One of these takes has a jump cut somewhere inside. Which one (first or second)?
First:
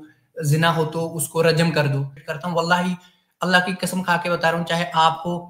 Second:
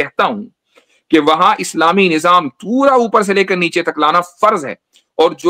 first